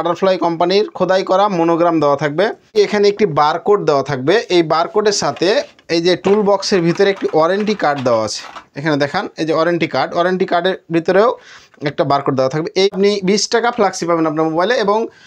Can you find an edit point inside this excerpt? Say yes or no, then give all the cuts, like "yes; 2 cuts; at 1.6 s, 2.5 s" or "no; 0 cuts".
yes; 2 cuts; at 2.7 s, 12.9 s